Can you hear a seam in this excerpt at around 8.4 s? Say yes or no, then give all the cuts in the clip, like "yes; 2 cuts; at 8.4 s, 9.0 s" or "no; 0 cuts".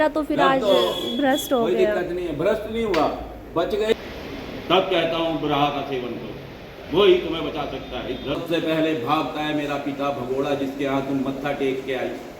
yes; 2 cuts; at 3.9 s, 8.4 s